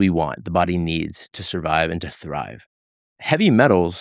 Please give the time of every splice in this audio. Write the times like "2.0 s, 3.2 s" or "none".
1.3 s